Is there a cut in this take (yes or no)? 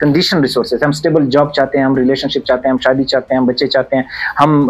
no